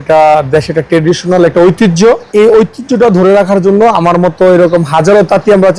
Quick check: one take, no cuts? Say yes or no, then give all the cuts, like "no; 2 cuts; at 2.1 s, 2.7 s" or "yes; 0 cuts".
no; 1 cut; at 2.3 s